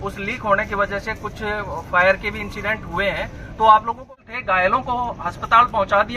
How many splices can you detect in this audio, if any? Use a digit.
1